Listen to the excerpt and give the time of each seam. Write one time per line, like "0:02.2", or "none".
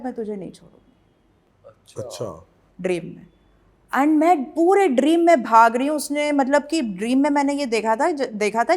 none